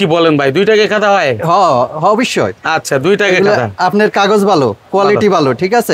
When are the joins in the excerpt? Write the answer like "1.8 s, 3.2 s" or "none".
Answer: none